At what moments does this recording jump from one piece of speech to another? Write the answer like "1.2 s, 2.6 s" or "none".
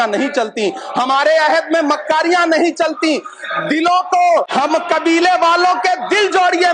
4.5 s